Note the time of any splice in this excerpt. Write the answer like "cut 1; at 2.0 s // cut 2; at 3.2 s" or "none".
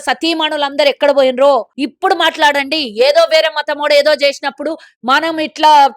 cut 1; at 1.8 s